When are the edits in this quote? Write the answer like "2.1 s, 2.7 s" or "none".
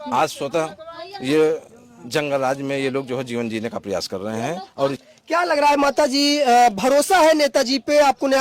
5.0 s